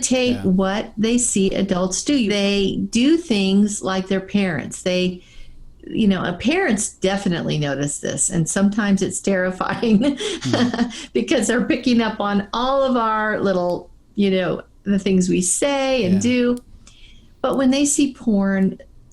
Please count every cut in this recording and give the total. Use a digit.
1